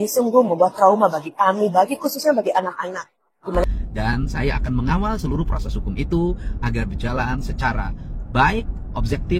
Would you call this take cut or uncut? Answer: cut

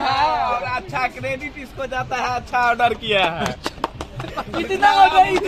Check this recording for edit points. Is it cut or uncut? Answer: uncut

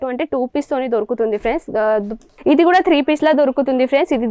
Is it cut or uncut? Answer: cut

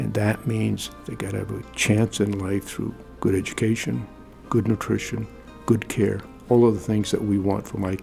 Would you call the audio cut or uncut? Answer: cut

